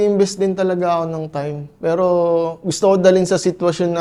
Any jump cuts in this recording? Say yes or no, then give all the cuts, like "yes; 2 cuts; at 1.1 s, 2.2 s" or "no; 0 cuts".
no; 0 cuts